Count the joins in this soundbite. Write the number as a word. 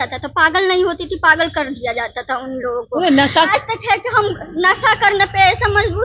one